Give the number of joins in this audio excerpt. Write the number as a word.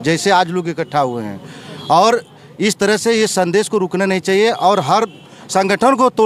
zero